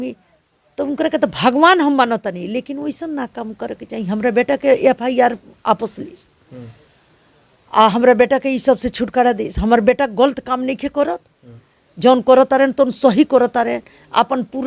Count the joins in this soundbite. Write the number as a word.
zero